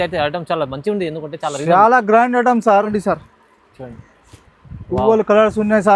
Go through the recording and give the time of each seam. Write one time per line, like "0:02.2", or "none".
0:03.0